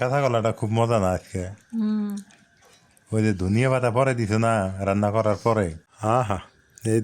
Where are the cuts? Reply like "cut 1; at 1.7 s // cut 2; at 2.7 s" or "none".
cut 1; at 5.9 s